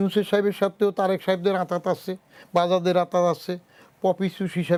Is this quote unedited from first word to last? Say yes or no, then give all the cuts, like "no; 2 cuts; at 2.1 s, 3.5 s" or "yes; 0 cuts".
yes; 0 cuts